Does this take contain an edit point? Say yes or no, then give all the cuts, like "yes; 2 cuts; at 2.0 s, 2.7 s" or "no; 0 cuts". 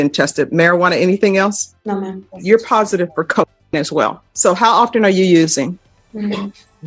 yes; 3 cuts; at 2.3 s, 4.3 s, 5.9 s